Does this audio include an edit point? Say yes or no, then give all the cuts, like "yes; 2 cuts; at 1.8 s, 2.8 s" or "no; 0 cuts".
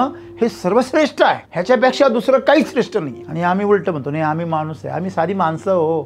yes; 2 cuts; at 1.5 s, 3.2 s